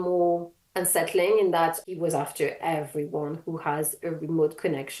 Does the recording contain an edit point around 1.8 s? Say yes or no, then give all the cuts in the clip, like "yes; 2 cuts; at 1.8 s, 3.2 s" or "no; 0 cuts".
yes; 1 cut; at 1.8 s